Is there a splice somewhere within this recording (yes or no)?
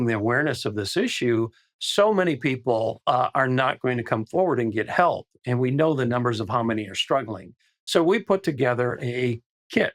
no